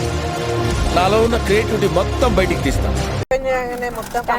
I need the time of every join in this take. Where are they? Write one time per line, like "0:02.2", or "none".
0:03.2